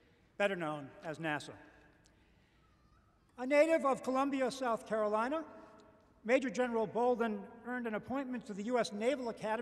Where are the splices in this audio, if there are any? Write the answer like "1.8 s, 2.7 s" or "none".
7.3 s